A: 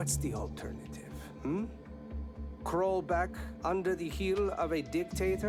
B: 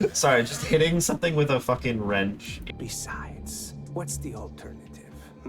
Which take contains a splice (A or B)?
B